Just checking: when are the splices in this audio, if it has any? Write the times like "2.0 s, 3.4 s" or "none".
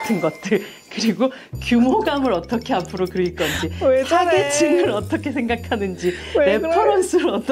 none